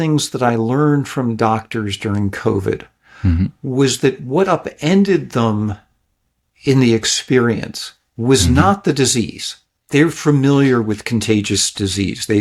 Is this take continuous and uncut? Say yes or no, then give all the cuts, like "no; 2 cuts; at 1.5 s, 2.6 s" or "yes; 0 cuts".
yes; 0 cuts